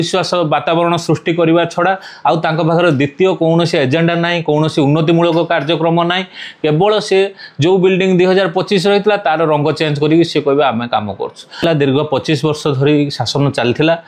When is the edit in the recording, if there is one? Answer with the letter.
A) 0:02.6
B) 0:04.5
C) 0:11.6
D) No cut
C